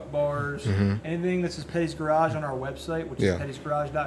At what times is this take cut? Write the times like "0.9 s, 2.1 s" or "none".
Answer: none